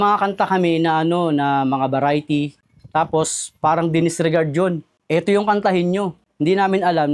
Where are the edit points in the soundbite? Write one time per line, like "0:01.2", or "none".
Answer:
none